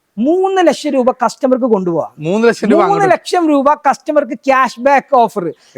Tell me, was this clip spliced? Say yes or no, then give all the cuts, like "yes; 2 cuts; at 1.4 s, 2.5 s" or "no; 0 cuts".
no; 0 cuts